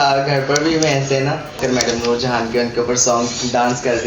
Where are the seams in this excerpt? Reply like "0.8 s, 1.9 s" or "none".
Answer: 1.6 s